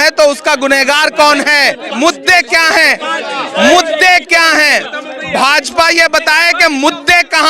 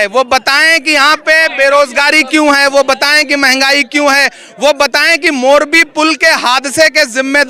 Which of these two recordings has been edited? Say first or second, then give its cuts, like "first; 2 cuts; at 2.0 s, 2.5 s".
first; 1 cut; at 1.9 s